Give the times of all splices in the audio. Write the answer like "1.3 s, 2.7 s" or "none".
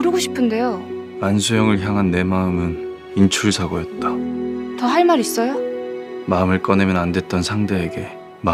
none